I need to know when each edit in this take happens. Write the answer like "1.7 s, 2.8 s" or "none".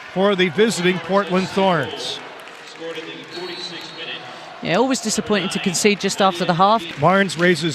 none